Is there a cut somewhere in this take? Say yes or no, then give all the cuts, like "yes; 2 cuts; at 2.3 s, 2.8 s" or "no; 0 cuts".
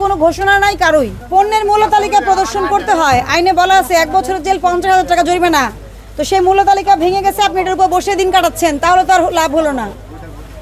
yes; 1 cut; at 1.2 s